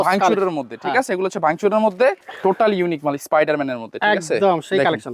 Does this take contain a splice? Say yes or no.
yes